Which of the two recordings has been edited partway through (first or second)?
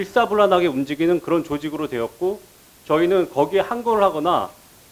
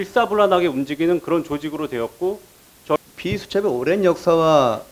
second